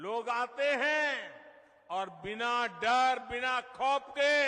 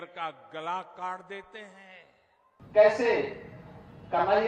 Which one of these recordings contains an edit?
second; 1 cut; at 2.6 s

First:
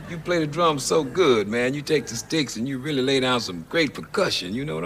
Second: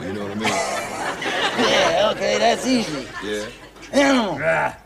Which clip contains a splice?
second; 1 cut; at 3.7 s

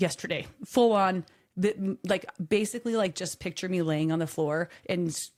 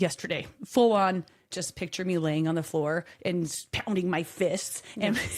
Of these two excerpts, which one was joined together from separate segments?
second; 2 cuts; at 1.5 s, 3.7 s

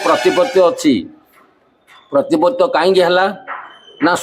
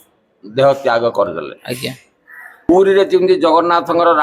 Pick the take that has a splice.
second; 1 cut; at 2.7 s

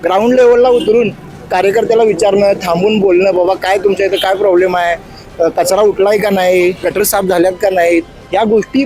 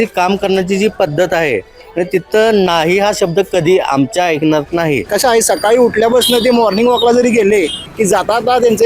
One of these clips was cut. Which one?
second; 2 cuts; at 5.1 s, 7.8 s

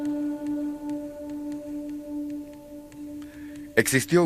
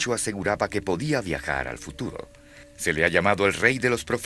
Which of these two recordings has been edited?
second; 1 cut; at 2.3 s

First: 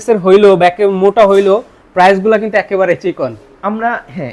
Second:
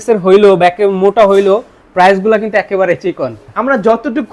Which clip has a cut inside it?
second; 1 cut; at 3.4 s

